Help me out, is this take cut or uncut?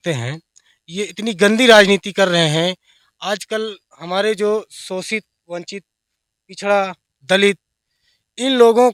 uncut